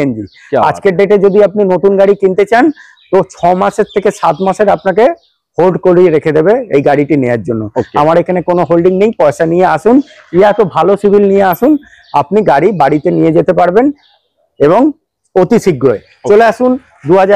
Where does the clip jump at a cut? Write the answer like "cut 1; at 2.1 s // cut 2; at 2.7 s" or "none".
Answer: none